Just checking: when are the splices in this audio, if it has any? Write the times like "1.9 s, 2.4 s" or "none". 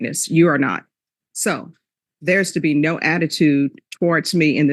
1.2 s